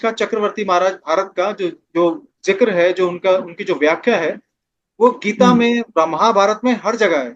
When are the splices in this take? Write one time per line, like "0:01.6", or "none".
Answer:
none